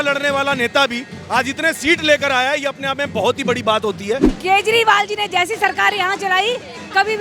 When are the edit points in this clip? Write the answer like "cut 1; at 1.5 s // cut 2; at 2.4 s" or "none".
cut 1; at 4.3 s